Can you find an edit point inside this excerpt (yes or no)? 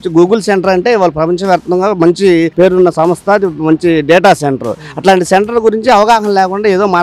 no